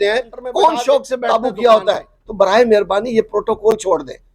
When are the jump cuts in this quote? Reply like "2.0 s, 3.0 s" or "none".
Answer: 1.2 s